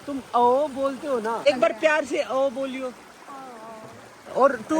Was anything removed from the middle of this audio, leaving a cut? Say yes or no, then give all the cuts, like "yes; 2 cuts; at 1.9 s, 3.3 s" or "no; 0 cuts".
yes; 1 cut; at 1.4 s